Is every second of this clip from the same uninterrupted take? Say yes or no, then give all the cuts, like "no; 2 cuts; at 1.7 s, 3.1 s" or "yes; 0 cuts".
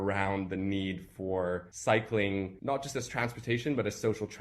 no; 2 cuts; at 1.7 s, 2.5 s